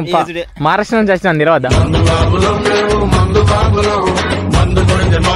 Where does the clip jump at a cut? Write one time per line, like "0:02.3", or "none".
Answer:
none